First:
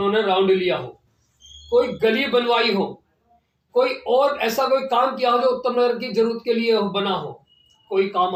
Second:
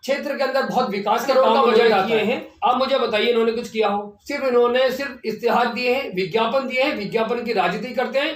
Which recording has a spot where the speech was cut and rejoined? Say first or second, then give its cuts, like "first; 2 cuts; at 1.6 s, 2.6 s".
second; 1 cut; at 2.5 s